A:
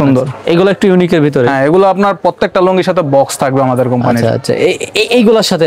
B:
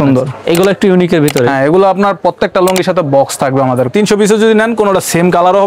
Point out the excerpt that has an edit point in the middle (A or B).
B